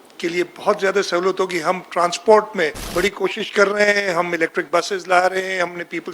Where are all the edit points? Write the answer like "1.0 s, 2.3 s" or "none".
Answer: 2.8 s